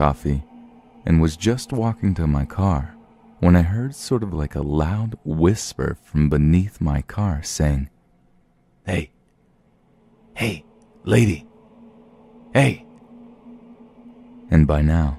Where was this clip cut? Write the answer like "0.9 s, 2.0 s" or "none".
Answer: none